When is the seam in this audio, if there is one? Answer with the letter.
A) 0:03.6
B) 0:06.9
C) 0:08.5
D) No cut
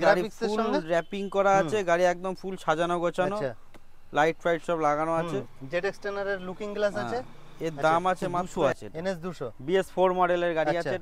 C